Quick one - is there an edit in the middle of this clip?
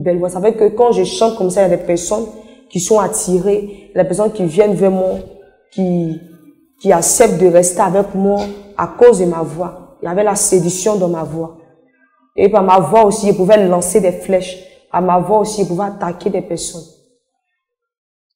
no; 0 cuts

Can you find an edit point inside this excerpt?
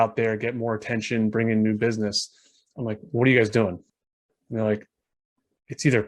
yes; 1 cut; at 3.8 s

